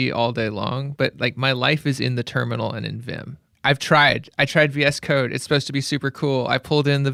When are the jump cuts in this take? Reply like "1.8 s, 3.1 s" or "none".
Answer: none

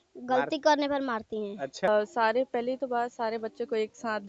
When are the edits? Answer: 1.9 s

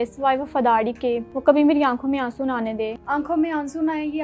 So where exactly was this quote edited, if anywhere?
1.3 s, 3.0 s

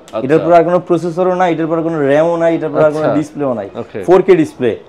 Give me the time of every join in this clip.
none

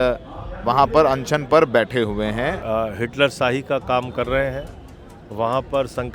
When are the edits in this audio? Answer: 2.6 s

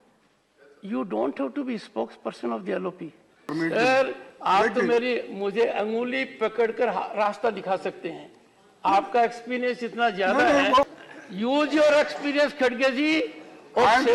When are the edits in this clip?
3.5 s, 10.9 s

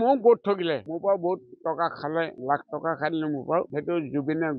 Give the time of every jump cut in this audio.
0.9 s, 2.4 s, 3.7 s

